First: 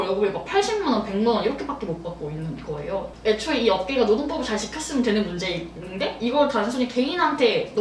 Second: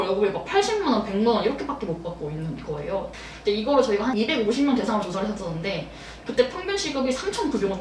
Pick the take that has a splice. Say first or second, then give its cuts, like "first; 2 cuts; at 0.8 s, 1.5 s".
first; 1 cut; at 3.1 s